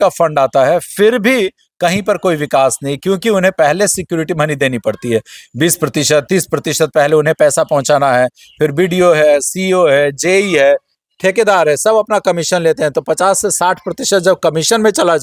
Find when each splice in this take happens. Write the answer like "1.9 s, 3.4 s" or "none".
none

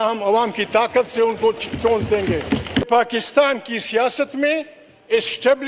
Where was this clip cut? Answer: 2.8 s

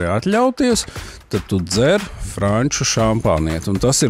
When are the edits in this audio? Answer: none

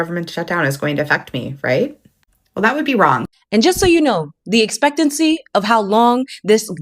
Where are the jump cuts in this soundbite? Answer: 3.3 s

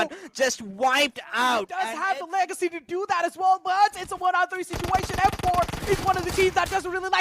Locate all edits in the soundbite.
1.9 s

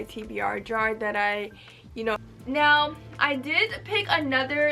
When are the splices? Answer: 2.2 s

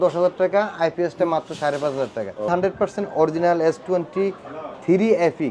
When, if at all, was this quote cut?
2.5 s

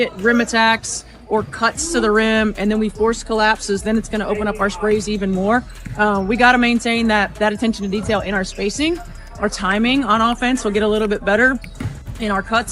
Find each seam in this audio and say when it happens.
11.2 s

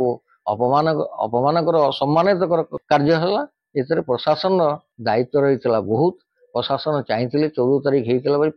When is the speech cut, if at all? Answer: 2.8 s, 4.9 s

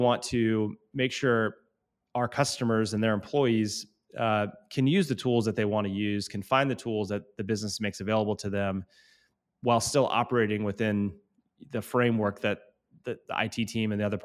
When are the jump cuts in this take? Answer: none

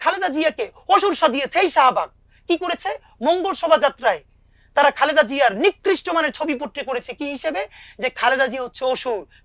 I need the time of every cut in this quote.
none

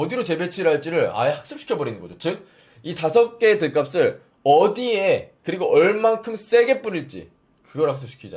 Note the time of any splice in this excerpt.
5.4 s

